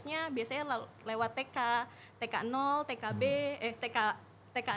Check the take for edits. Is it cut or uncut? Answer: uncut